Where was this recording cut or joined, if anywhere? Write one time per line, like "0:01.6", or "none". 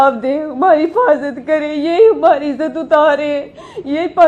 none